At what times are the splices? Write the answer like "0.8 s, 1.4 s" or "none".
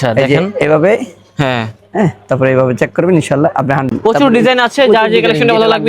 4.0 s